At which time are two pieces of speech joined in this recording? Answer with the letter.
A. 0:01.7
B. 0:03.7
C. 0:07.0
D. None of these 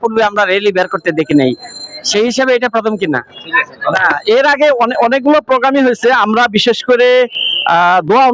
D